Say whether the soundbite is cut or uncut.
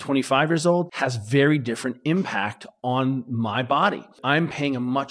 cut